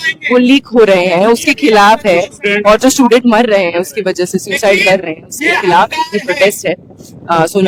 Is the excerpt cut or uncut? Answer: uncut